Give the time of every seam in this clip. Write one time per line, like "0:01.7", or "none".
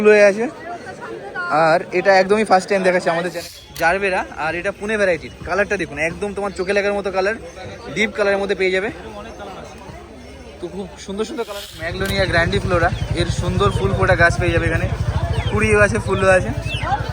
0:03.5
0:11.5